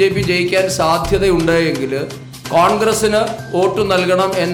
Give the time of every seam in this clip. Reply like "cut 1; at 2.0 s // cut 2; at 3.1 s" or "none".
none

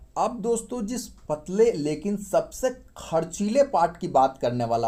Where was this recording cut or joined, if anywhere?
none

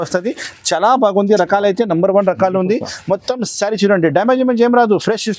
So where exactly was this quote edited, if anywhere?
none

